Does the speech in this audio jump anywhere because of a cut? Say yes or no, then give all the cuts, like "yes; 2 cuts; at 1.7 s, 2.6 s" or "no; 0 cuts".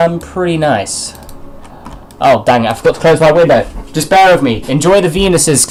no; 0 cuts